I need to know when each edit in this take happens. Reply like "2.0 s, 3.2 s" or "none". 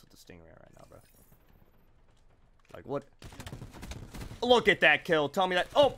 none